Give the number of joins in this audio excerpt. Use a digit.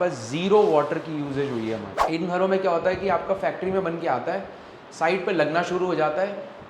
1